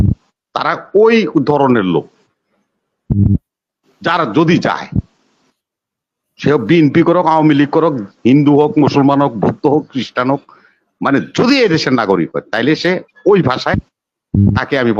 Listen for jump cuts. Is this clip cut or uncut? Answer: uncut